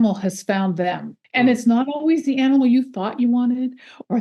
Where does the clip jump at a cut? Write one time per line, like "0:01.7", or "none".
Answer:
0:01.2